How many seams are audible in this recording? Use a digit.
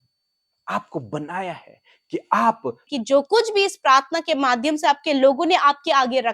1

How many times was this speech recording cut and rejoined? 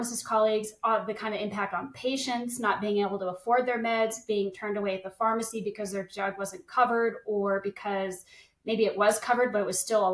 0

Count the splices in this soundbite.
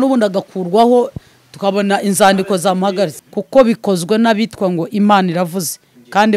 1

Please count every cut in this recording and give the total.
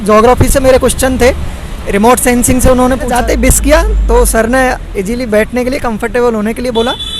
1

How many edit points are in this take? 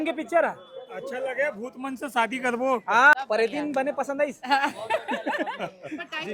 1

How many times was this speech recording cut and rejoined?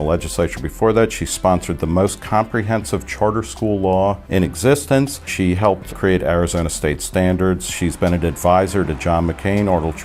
1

